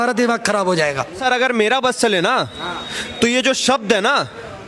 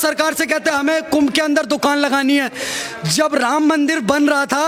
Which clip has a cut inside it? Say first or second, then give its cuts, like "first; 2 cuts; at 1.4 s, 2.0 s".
first; 1 cut; at 1.2 s